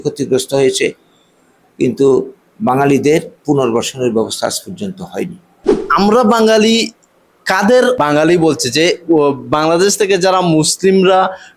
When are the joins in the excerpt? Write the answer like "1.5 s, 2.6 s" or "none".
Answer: 5.8 s, 8.0 s